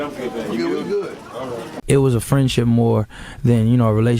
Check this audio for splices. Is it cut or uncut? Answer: cut